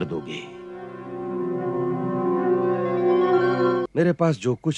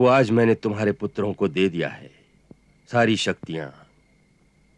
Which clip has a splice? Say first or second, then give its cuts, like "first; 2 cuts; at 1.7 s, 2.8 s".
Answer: first; 1 cut; at 3.9 s